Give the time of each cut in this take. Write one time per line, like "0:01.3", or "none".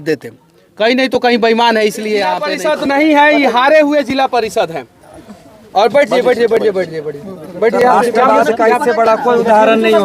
0:02.5